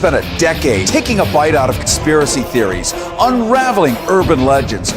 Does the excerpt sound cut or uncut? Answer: uncut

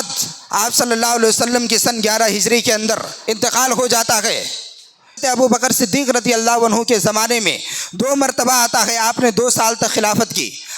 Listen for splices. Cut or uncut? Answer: cut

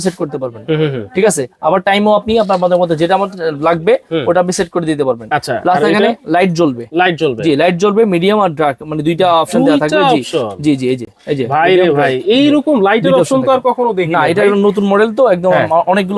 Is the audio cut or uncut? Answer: uncut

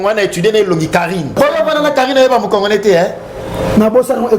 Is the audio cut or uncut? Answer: cut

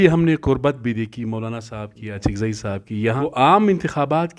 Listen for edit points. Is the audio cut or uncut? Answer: cut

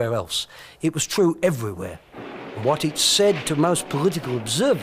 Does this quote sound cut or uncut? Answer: uncut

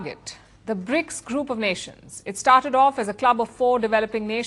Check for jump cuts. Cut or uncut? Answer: uncut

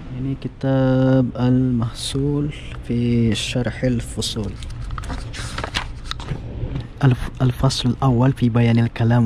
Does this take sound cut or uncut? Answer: cut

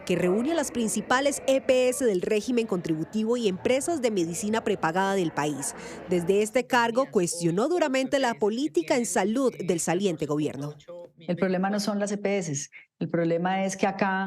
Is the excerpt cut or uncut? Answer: cut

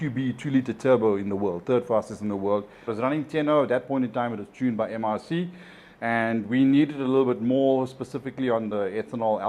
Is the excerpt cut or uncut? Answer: cut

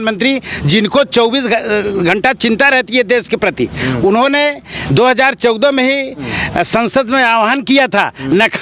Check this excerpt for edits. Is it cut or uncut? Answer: uncut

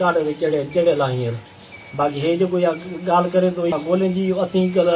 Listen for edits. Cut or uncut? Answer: cut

